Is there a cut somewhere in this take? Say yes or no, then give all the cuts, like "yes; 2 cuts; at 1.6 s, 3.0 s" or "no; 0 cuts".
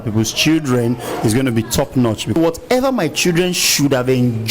yes; 1 cut; at 2.4 s